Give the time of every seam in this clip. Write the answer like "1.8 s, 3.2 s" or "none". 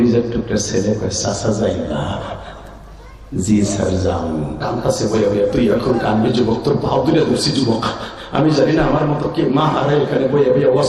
4.6 s